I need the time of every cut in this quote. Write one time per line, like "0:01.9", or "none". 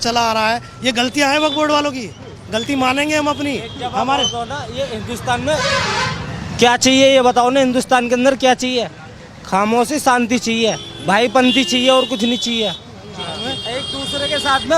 none

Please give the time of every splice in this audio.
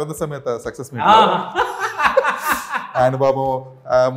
none

